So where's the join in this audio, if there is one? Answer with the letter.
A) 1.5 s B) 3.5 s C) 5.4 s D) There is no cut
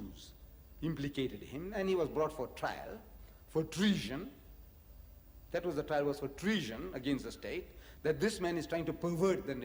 D